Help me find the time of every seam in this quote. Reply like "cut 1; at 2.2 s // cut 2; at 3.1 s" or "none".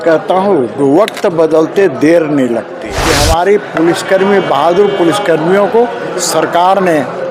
cut 1; at 3.0 s